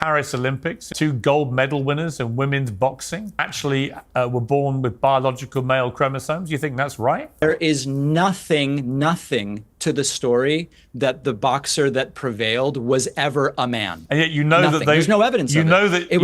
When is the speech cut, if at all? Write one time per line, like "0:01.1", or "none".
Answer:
0:00.9
0:03.5
0:07.4
0:14.0